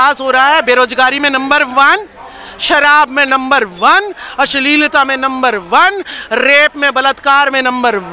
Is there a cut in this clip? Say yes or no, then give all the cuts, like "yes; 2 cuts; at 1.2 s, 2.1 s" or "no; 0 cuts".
no; 0 cuts